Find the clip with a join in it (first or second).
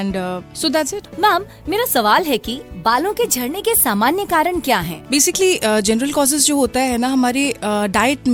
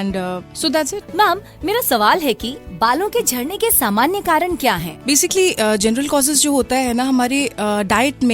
second